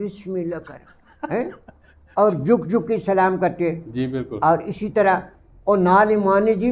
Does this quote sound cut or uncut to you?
uncut